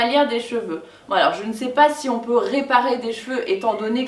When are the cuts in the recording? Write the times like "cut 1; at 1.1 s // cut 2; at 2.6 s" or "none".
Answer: none